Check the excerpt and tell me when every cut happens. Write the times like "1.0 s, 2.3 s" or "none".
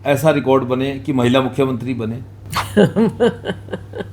none

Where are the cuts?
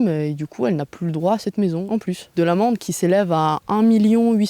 2.1 s

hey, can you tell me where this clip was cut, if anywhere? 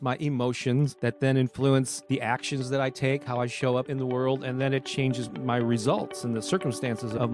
0.9 s, 2.0 s, 3.9 s

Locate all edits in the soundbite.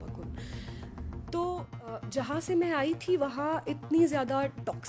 1.7 s

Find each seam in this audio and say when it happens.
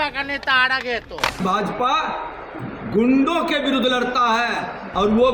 1.4 s

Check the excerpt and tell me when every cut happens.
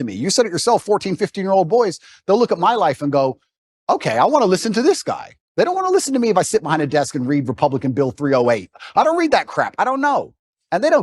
none

